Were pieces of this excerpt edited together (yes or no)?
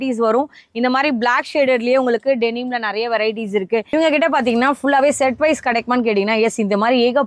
yes